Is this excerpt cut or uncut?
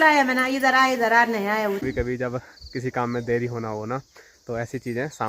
cut